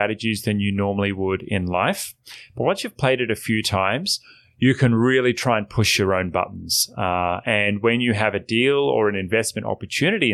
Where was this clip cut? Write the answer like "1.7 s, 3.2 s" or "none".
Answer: none